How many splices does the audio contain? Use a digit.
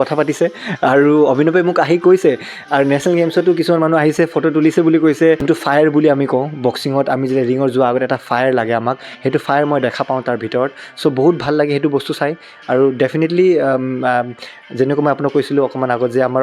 1